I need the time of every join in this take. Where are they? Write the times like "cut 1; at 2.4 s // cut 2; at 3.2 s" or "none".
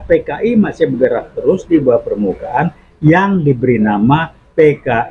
none